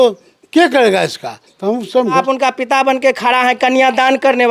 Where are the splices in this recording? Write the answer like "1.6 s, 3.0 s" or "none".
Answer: 2.1 s